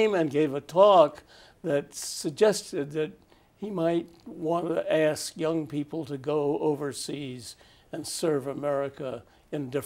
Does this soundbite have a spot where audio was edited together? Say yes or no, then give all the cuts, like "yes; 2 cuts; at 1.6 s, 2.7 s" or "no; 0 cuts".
no; 0 cuts